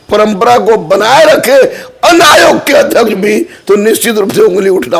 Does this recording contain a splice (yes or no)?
no